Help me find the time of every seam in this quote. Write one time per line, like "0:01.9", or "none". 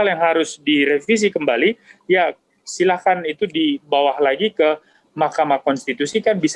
none